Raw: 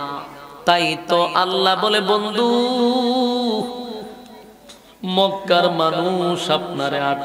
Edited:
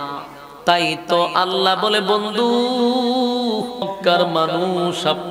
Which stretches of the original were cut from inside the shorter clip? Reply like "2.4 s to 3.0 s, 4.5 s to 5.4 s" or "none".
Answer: 3.9 s to 5.3 s